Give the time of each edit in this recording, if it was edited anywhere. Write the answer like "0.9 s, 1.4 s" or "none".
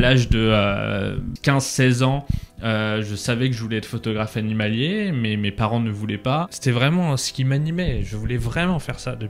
1.3 s, 6.5 s